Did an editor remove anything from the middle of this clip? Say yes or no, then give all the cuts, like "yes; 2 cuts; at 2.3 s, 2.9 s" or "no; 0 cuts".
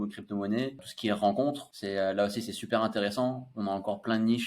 yes; 2 cuts; at 0.9 s, 1.7 s